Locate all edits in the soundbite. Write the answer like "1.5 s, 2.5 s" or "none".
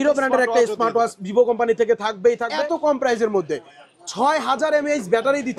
2.5 s